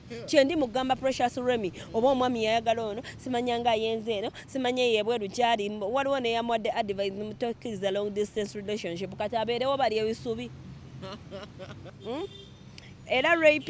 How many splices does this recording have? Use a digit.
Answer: 1